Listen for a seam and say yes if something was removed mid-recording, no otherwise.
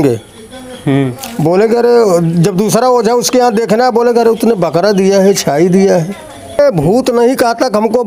yes